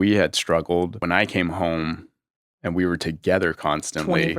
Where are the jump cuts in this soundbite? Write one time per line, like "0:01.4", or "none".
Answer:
0:01.0